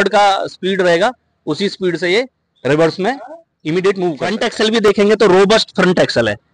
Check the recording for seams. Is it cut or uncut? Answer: cut